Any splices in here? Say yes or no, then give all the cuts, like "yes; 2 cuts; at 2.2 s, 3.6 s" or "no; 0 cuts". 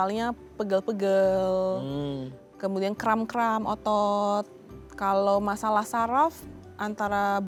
no; 0 cuts